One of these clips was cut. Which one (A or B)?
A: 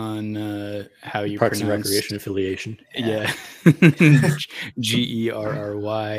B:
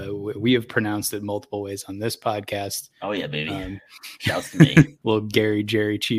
B